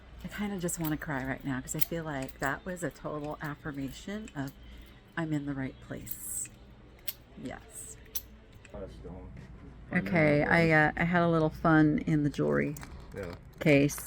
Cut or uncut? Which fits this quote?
cut